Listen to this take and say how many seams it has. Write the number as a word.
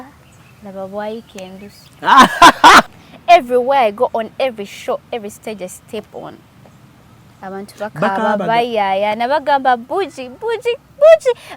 one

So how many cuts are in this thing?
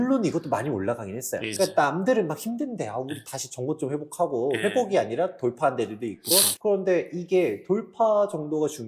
two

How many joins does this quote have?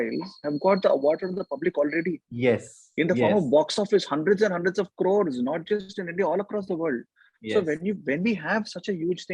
zero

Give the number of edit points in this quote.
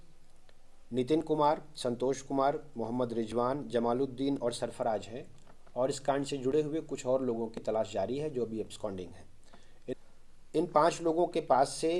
one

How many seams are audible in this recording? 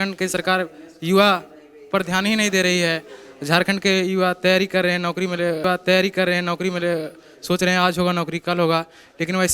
zero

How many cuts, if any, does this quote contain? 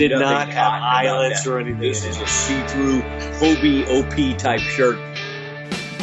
one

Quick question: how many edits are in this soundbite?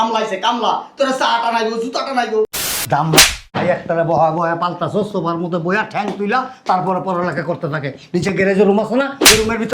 one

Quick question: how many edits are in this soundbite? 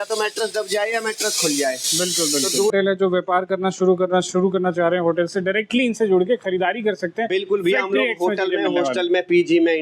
one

